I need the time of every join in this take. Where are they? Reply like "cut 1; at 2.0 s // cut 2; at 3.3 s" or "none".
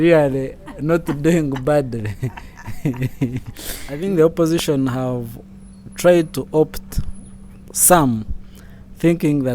cut 1; at 4.0 s